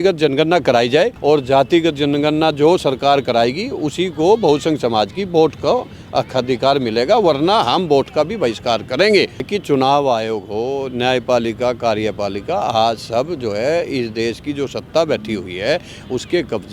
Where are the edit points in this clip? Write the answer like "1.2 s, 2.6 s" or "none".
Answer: 1.2 s, 9.5 s